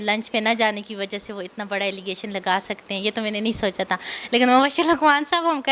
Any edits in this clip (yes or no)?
no